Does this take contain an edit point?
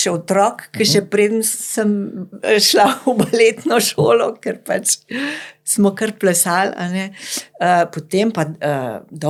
no; 0 cuts

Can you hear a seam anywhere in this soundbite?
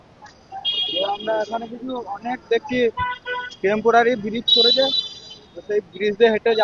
no; 0 cuts

